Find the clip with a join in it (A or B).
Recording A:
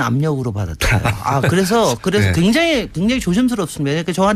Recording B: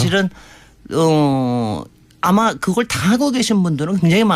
A